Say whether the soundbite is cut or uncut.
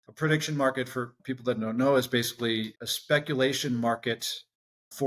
cut